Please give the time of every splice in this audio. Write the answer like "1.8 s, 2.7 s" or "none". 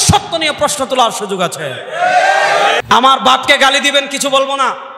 2.8 s